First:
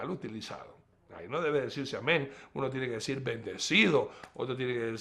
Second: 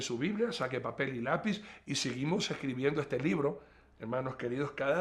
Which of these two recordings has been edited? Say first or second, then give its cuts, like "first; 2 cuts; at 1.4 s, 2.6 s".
first; 1 cut; at 3.4 s